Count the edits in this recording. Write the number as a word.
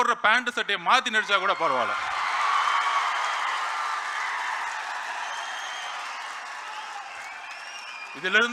zero